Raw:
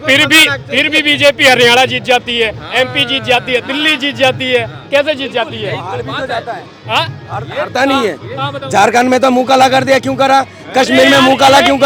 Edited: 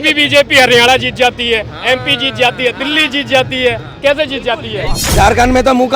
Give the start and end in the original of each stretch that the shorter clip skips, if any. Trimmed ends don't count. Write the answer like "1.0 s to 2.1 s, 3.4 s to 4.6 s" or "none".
5.9 s to 8.6 s